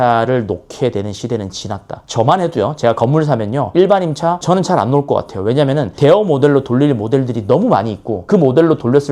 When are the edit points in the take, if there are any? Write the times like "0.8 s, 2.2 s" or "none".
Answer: none